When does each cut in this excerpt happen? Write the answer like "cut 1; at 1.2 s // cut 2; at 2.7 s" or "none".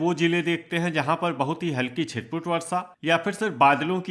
none